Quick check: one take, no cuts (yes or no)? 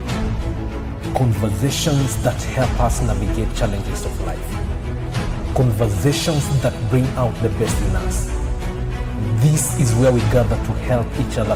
yes